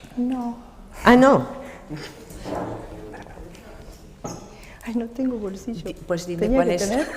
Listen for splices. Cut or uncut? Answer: cut